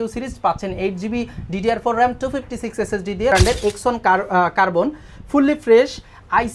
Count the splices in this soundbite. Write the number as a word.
one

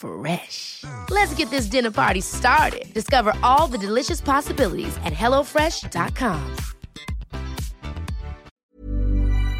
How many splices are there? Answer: one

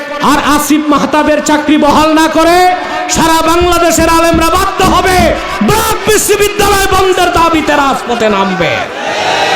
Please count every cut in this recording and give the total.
zero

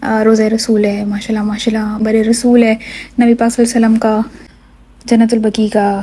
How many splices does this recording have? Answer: two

